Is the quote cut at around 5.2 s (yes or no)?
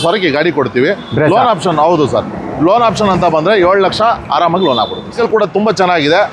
yes